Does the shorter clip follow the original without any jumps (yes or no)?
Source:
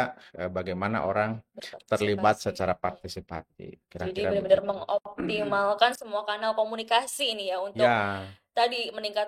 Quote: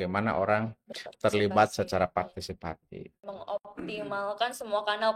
no